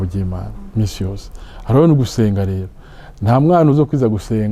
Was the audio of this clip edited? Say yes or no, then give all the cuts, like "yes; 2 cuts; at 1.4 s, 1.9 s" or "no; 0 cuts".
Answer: no; 0 cuts